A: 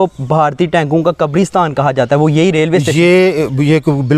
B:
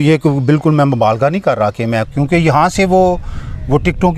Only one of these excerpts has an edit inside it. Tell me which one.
B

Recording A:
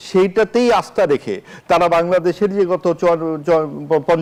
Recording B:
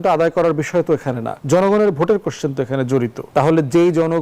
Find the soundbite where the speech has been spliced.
B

